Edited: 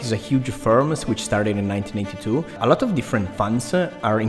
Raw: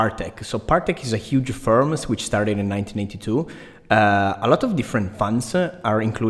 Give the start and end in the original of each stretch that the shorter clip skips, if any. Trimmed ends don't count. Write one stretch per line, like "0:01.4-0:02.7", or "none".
0:03.6-0:04.4